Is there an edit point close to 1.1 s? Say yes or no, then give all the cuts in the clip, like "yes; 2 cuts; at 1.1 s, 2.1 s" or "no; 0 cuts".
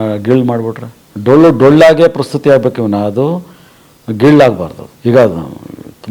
no; 1 cut; at 4.9 s